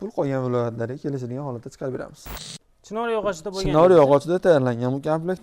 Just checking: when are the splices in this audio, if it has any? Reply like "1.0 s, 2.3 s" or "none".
2.2 s